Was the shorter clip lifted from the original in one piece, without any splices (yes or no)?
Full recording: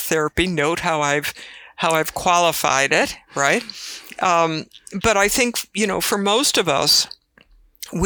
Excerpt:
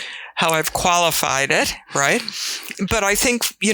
no